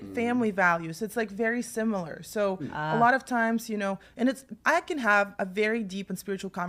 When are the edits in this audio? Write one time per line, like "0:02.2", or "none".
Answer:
none